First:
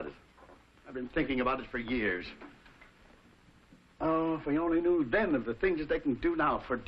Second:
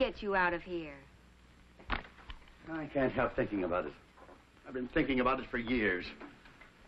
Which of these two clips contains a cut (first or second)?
second